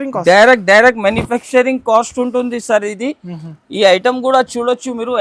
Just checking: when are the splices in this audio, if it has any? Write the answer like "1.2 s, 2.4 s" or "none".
none

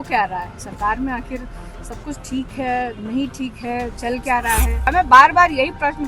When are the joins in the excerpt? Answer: 4.9 s

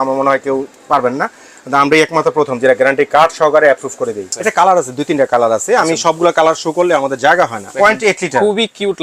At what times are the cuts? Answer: 4.3 s, 7.7 s

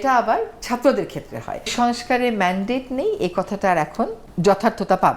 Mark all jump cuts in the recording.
1.7 s, 4.2 s

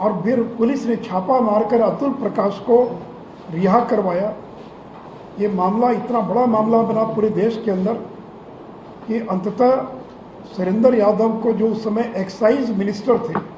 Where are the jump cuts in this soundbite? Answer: none

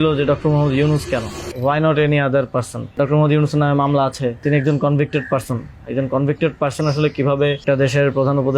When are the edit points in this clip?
1.4 s, 2.9 s, 4.4 s, 7.6 s

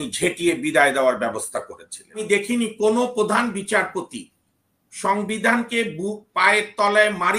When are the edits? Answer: 2.2 s

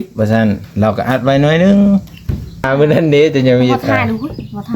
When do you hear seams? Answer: 2.7 s

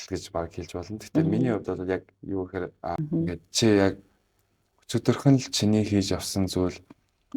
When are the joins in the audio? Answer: 3.0 s

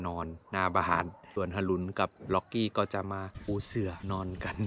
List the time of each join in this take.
1.2 s, 3.7 s

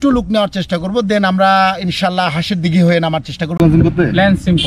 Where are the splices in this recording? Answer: 3.6 s

